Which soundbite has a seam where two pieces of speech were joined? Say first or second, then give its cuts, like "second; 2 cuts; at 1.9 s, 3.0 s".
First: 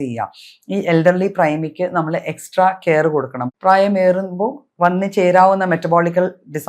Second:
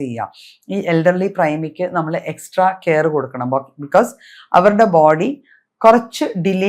first; 1 cut; at 3.4 s